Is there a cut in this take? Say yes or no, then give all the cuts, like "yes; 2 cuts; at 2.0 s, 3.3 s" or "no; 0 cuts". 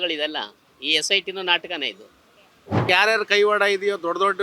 yes; 1 cut; at 2.8 s